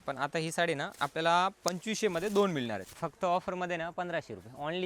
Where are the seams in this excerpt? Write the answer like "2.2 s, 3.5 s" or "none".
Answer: 2.9 s